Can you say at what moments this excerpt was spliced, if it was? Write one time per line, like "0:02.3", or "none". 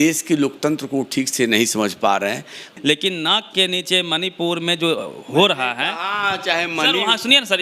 0:02.6